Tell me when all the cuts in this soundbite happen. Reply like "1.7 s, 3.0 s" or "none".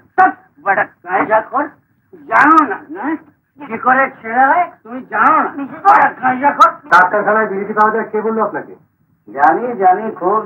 6.8 s